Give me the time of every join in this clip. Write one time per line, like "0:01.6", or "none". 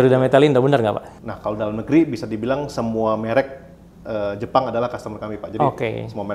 0:01.1